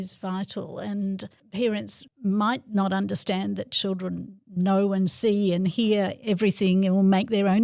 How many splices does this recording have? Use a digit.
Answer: 2